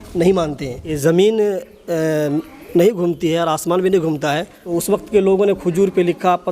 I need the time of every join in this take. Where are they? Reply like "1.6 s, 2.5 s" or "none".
1.0 s, 4.6 s